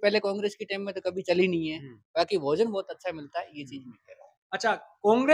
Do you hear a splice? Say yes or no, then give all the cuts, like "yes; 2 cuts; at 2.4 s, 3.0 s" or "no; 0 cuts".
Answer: no; 0 cuts